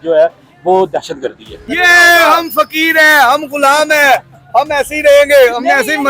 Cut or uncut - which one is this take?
cut